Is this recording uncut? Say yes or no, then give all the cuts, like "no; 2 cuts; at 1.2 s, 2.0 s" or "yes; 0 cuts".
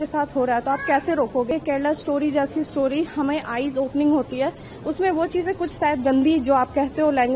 no; 1 cut; at 1.5 s